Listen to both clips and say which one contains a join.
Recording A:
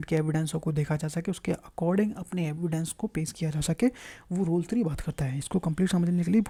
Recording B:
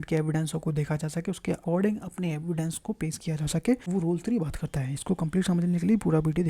B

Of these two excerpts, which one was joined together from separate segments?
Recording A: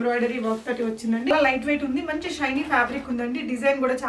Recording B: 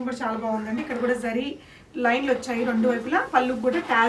A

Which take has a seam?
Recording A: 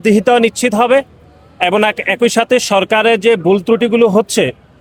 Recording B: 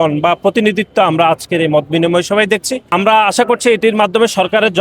B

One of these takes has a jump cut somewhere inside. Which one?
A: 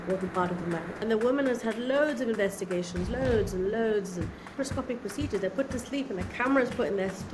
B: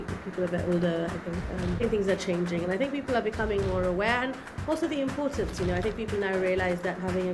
A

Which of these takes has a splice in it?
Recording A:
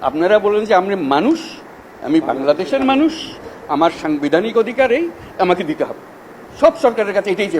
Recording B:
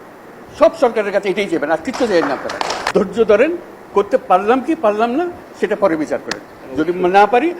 B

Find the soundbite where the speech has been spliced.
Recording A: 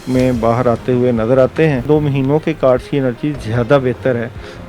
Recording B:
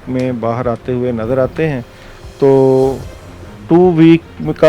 A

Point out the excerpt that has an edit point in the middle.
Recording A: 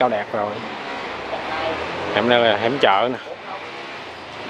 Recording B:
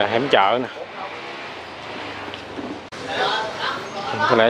B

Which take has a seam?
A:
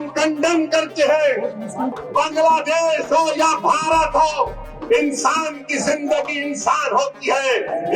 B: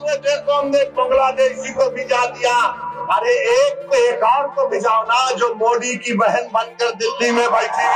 A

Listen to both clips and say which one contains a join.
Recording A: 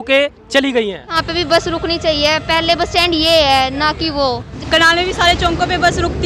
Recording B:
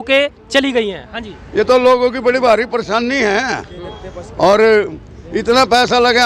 A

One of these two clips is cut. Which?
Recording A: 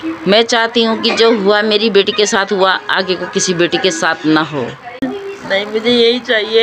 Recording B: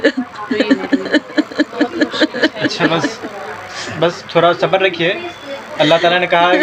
A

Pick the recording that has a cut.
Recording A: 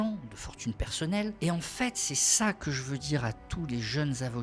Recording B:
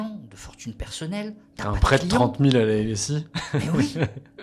A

